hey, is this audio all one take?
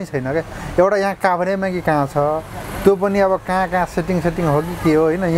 yes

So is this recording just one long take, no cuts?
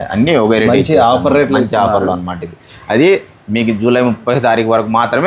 no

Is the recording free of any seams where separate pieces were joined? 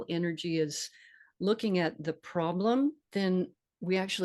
no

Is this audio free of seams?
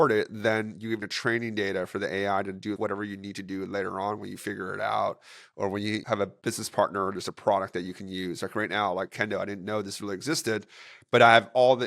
no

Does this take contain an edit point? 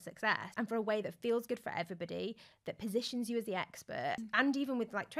yes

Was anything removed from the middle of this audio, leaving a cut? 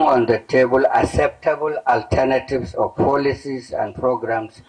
no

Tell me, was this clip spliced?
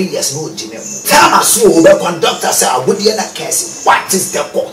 yes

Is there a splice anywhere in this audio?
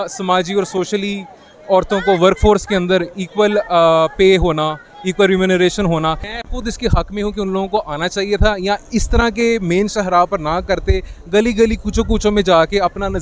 yes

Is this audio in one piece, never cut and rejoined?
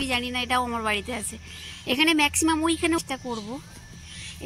no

